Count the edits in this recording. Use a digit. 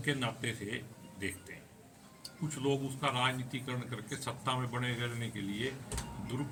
0